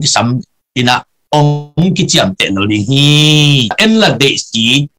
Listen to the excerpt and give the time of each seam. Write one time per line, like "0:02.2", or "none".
0:03.8